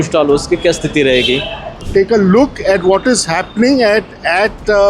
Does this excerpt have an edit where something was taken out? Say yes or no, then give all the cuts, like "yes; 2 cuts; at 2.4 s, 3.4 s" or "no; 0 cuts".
yes; 1 cut; at 1.8 s